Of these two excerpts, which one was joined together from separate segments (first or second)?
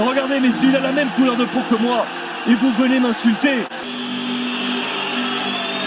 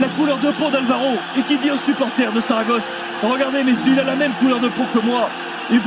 first